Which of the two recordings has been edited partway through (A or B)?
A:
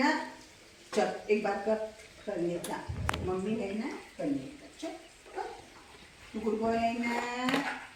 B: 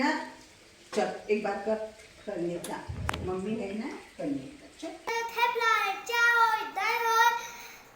B